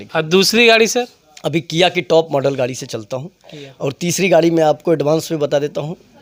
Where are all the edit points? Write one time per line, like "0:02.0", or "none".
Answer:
none